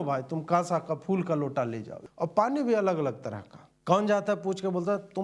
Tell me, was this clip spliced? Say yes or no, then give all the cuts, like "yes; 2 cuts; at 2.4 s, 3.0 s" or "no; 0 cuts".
yes; 1 cut; at 1.9 s